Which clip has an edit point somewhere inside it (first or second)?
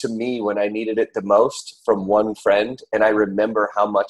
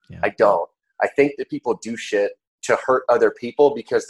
second